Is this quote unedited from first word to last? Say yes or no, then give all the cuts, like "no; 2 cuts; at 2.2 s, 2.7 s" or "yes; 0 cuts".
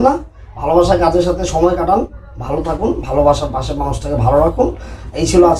yes; 0 cuts